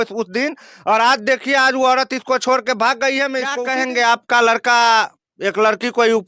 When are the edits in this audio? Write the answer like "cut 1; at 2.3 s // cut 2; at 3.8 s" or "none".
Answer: cut 1; at 3.6 s